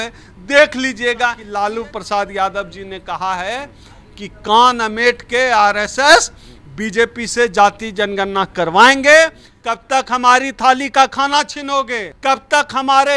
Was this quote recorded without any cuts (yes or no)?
no